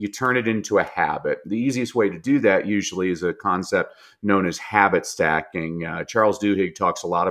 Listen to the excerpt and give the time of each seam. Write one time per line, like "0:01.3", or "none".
none